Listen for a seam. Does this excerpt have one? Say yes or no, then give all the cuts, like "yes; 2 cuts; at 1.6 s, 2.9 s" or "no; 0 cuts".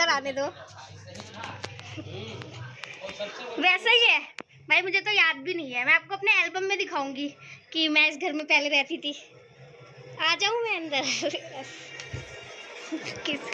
no; 0 cuts